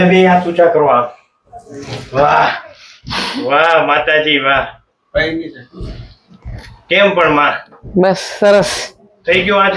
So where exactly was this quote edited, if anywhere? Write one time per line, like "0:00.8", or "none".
none